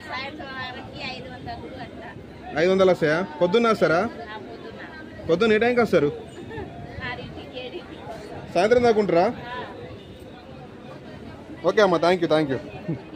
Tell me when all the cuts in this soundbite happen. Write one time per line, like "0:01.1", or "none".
none